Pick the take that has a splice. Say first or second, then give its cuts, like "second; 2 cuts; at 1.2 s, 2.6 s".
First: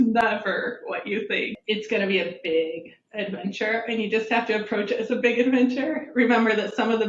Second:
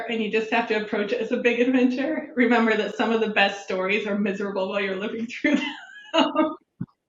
first; 1 cut; at 1.6 s